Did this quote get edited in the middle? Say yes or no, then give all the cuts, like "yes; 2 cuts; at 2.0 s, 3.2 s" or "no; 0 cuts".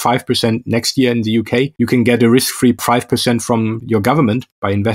yes; 3 cuts; at 1.7 s, 2.8 s, 3.8 s